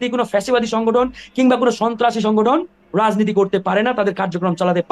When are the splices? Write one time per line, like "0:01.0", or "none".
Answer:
none